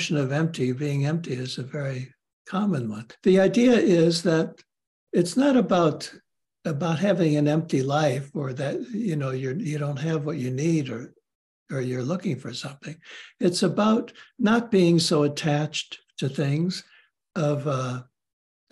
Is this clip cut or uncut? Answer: cut